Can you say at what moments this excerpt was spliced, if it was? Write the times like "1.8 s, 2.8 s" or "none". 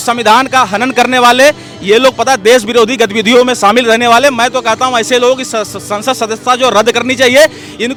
none